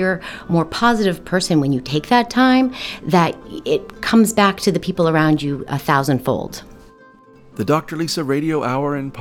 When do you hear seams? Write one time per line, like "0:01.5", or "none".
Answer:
0:07.4